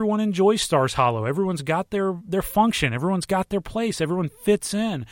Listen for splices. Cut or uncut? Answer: uncut